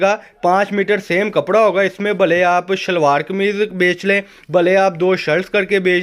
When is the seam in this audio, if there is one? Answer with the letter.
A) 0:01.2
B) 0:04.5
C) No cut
C